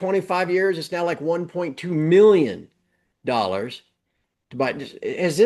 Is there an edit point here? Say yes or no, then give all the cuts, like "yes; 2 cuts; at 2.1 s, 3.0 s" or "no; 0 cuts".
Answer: no; 0 cuts